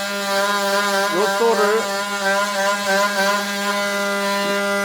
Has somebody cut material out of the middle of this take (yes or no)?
no